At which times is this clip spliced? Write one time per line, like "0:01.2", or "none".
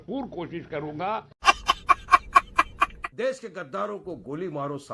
0:03.0